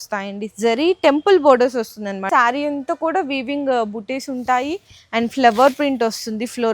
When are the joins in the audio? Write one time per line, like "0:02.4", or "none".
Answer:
0:02.3